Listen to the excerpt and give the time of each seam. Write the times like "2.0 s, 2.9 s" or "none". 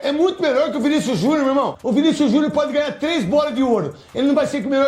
1.7 s